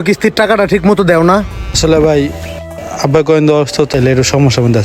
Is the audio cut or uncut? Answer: cut